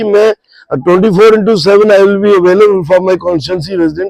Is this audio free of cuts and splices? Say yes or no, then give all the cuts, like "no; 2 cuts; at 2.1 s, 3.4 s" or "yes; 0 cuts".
yes; 0 cuts